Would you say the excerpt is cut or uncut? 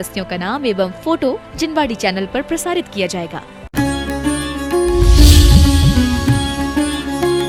cut